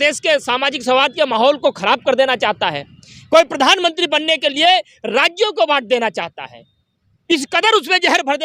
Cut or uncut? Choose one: uncut